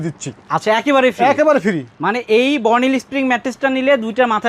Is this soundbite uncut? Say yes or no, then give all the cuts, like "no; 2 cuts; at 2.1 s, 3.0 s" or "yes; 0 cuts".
yes; 0 cuts